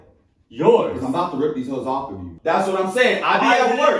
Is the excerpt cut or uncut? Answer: cut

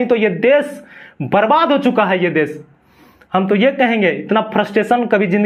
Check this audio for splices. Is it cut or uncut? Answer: uncut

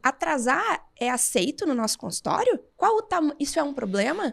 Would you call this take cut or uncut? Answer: cut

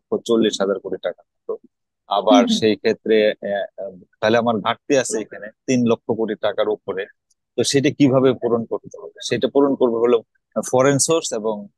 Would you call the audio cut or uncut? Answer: uncut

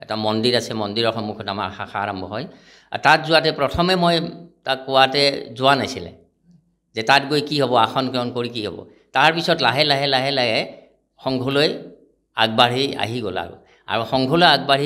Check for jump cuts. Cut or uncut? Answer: uncut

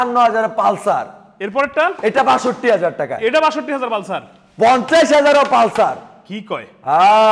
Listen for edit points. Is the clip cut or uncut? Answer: uncut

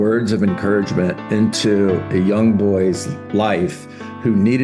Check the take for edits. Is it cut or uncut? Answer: cut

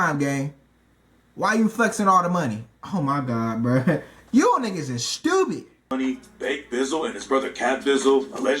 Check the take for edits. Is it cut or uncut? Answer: cut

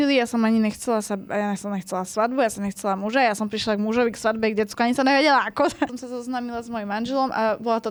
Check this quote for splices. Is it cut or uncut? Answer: uncut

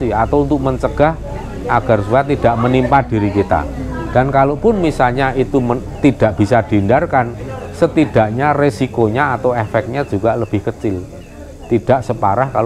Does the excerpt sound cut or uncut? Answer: uncut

